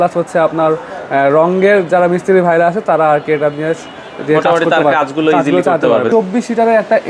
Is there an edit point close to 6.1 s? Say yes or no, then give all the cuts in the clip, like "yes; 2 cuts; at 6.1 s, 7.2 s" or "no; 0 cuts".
yes; 1 cut; at 6.1 s